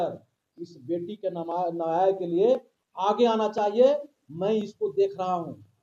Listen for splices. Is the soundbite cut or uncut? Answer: uncut